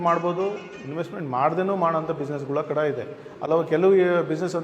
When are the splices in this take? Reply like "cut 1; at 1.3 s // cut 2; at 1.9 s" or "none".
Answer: cut 1; at 3.5 s